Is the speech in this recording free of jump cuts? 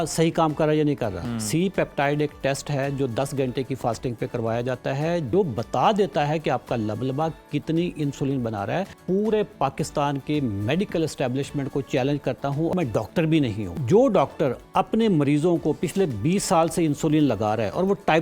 no; 5 cuts; at 1.2 s, 5.3 s, 9.0 s, 12.7 s, 13.7 s

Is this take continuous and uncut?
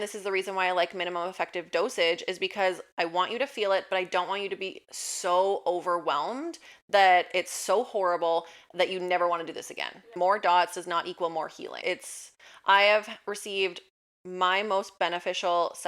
no; 2 cuts; at 10.0 s, 11.7 s

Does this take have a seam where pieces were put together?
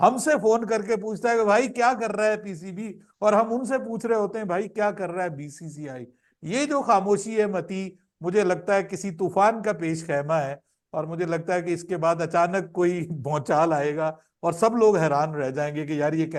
no; 0 cuts

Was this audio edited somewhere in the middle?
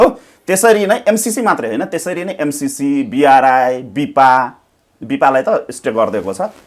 no; 0 cuts

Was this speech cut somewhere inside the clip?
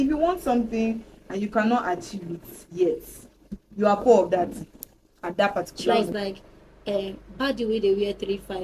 yes; 1 cut; at 6.1 s

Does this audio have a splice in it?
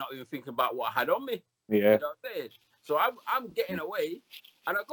no; 0 cuts

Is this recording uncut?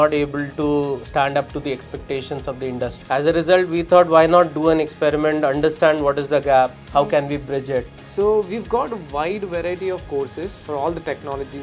no; 4 cuts; at 1.0 s, 3.0 s, 8.0 s, 10.6 s

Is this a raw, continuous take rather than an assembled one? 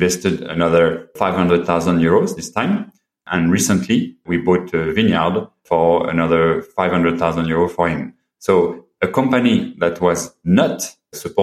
yes; 0 cuts

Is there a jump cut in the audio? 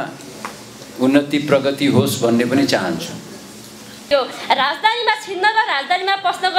yes; 1 cut; at 4.1 s

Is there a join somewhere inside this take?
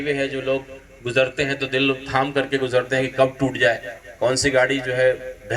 no; 0 cuts

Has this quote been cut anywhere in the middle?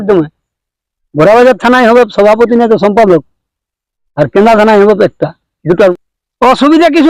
yes; 1 cut; at 5.9 s

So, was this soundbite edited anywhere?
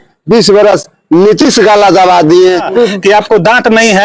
yes; 1 cut; at 2.7 s

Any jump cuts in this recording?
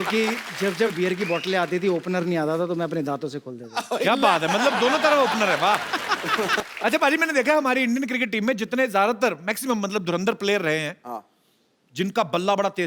yes; 1 cut; at 6.6 s

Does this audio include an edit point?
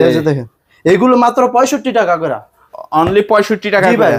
no; 0 cuts

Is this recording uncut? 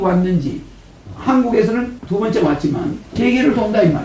no; 1 cut; at 3.1 s

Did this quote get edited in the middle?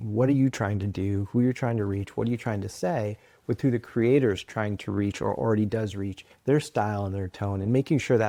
no; 0 cuts

